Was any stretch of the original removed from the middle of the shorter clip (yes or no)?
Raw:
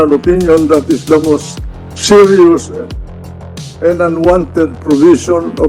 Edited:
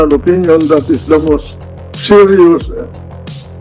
no